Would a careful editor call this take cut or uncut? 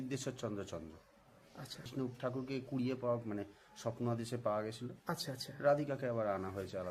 cut